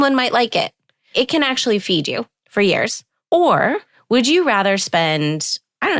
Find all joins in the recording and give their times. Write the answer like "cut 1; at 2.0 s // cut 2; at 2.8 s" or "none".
cut 1; at 1.1 s // cut 2; at 2.4 s // cut 3; at 3.1 s // cut 4; at 3.9 s